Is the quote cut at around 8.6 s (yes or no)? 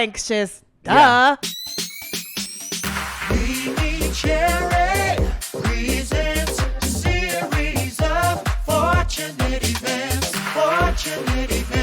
no